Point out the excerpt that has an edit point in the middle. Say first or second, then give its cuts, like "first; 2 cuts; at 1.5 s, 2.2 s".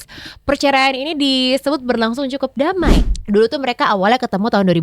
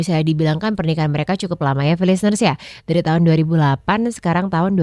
first; 1 cut; at 3.1 s